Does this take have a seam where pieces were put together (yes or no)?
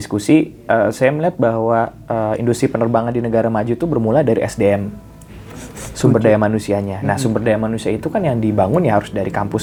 no